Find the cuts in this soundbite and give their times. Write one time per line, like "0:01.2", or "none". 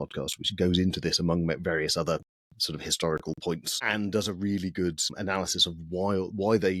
0:03.7
0:05.1